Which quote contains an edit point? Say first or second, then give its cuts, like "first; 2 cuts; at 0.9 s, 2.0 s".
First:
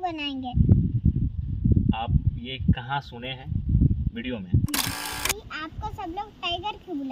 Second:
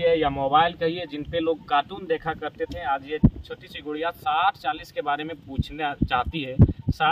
first; 1 cut; at 5.1 s